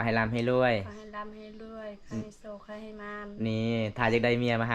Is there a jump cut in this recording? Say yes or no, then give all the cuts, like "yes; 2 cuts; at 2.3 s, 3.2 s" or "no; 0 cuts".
no; 0 cuts